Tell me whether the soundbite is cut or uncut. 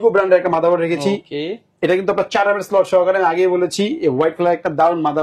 uncut